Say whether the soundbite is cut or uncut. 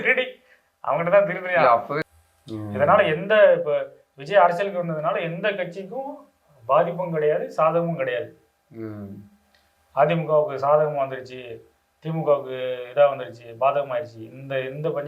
cut